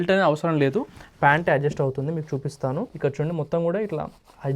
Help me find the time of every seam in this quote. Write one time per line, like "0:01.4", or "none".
0:02.9